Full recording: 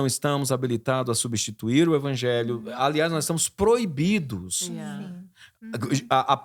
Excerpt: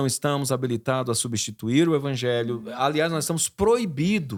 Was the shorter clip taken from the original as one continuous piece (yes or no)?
yes